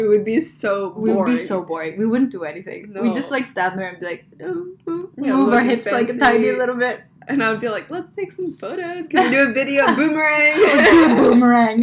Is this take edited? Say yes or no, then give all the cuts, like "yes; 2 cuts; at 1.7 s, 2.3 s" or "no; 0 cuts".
no; 0 cuts